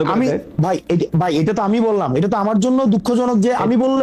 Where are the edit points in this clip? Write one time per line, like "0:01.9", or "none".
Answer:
none